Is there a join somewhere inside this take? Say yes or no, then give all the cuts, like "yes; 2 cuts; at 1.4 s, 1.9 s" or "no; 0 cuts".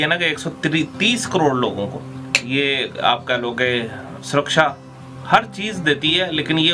no; 0 cuts